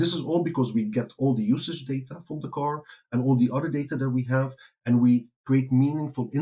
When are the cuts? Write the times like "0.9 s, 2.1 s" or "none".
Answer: 5.3 s